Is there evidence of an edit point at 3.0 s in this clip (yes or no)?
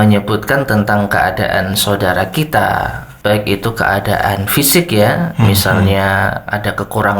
yes